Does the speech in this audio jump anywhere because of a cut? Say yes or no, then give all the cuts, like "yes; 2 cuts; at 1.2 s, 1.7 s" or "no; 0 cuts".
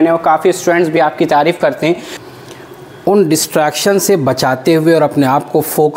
yes; 1 cut; at 2.1 s